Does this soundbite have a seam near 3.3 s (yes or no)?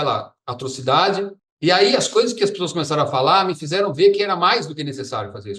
no